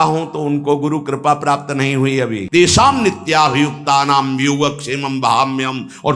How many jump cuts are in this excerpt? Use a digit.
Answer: 1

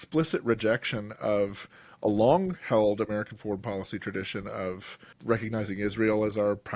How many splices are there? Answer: 1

